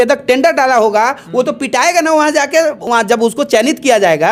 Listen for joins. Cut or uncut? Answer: uncut